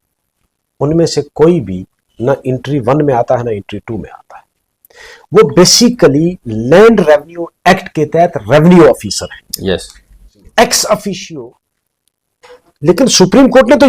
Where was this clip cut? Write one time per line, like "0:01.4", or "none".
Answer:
0:11.2

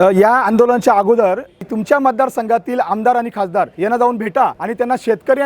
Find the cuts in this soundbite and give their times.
0:01.6
0:03.7
0:04.6

